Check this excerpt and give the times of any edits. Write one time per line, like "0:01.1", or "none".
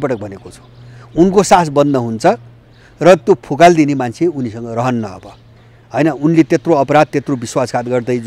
none